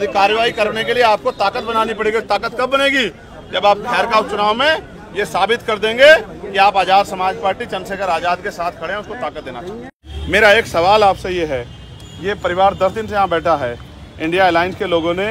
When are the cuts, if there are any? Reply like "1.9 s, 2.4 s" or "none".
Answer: 10.1 s